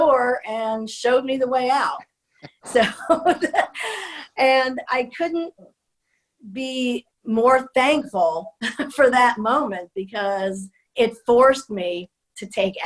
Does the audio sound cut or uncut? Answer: cut